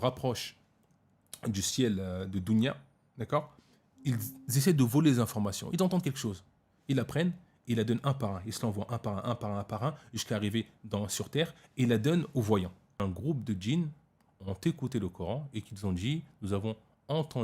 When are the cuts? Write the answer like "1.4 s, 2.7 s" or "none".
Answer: 13.0 s